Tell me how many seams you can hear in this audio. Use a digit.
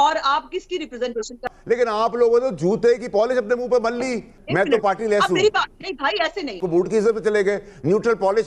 3